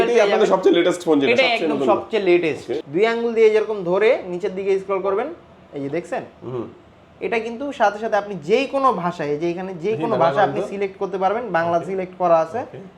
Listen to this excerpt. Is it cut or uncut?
cut